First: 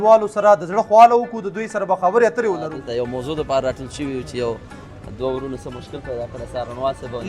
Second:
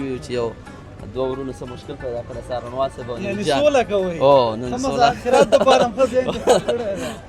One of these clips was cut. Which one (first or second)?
first